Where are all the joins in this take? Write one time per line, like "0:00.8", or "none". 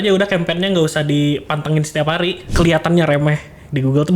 0:02.4